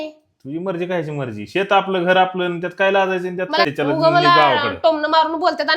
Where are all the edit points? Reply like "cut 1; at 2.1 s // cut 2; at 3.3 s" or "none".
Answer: cut 1; at 3.7 s

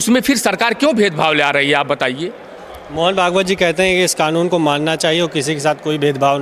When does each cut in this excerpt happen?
none

